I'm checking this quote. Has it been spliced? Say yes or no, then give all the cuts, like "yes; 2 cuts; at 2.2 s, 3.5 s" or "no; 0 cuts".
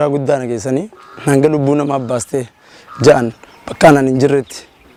no; 0 cuts